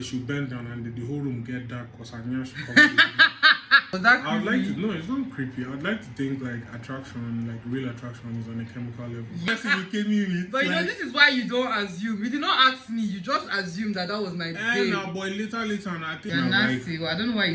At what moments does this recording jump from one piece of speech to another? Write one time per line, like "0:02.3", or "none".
0:03.9
0:09.4
0:16.3